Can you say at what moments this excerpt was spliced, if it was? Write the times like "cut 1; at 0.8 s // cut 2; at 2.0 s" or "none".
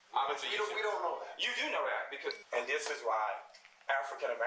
cut 1; at 2.4 s